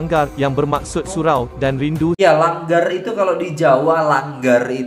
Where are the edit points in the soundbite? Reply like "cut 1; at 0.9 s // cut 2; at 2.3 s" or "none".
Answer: cut 1; at 2.2 s